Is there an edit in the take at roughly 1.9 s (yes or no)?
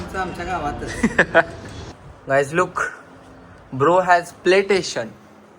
yes